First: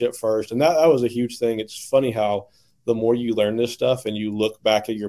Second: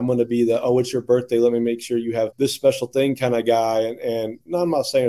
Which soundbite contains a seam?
second; 1 cut; at 2.3 s

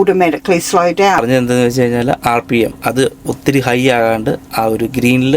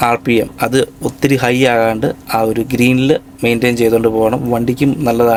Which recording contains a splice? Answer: first; 1 cut; at 1.2 s

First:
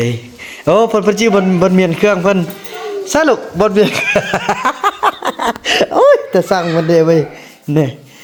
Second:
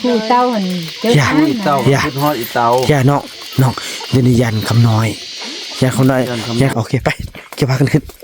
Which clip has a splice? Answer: second; 1 cut; at 6.7 s

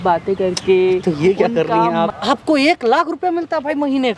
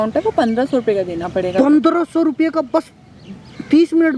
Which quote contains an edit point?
first; 1 cut; at 2.1 s

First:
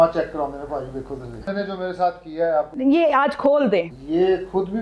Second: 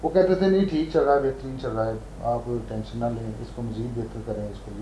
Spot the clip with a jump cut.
first; 3 cuts; at 1.5 s, 2.7 s, 4.0 s

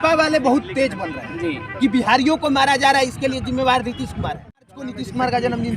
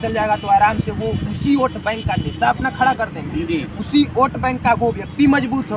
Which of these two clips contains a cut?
first; 1 cut; at 4.8 s

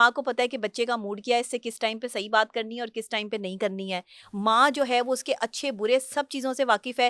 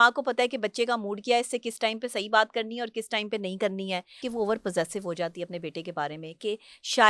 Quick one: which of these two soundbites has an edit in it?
second; 1 cut; at 4.2 s

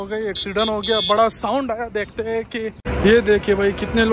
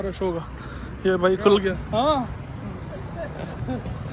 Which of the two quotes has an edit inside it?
first; 1 cut; at 2.8 s

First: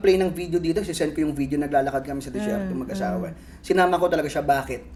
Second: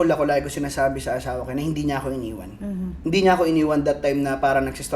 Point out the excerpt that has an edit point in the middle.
second; 1 cut; at 2.9 s

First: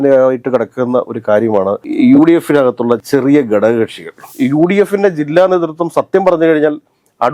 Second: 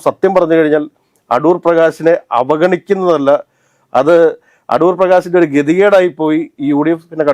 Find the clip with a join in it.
first; 1 cut; at 4.3 s

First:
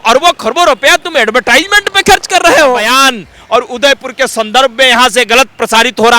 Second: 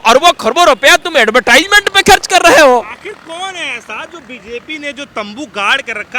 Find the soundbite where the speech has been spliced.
first; 1 cut; at 2.9 s

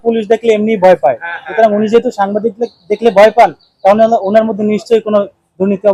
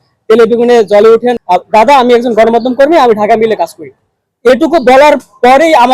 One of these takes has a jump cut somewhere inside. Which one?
second; 1 cut; at 1.4 s

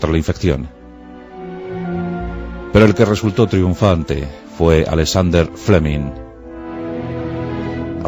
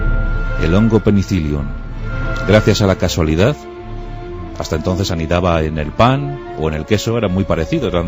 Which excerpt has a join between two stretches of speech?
second; 1 cut; at 2.4 s

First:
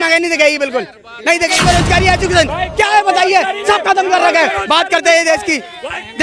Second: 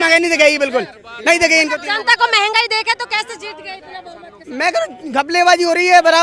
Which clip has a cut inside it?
first; 1 cut; at 1.6 s

